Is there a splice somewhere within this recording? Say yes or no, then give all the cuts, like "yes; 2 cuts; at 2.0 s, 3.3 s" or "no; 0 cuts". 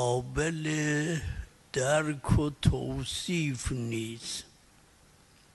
no; 0 cuts